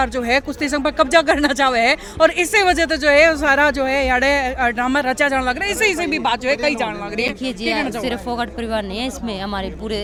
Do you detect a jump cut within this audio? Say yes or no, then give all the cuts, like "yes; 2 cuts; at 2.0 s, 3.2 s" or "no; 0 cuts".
no; 0 cuts